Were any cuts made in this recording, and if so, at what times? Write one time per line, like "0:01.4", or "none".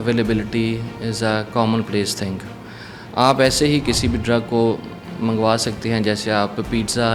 none